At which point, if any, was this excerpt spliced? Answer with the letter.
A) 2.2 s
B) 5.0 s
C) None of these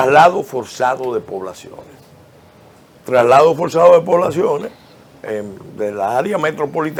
C